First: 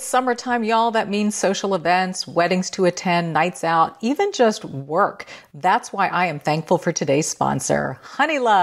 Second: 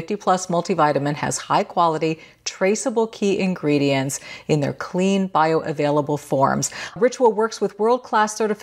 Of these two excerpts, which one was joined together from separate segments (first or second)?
second